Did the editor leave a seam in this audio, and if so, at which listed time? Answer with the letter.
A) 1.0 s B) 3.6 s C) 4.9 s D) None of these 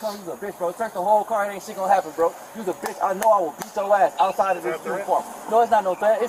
D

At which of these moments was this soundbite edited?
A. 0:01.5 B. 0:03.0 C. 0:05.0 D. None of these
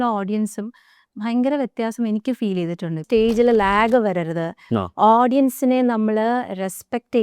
B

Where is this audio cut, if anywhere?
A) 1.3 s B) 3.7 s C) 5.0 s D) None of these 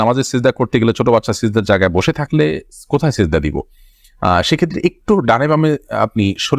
D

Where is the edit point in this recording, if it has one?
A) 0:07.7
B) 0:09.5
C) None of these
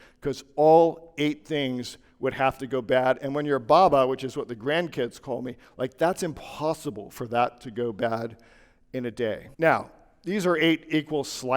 B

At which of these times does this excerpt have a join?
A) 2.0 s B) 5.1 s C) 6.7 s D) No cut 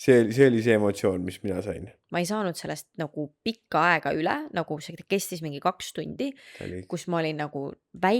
A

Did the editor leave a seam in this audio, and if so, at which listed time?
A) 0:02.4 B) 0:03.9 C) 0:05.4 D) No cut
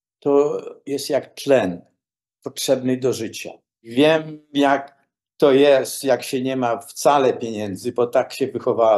B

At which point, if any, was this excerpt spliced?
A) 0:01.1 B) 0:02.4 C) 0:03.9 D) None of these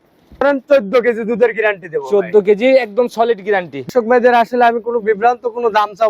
C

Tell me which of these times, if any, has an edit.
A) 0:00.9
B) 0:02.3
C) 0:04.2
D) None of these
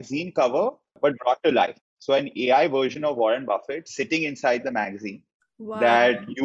A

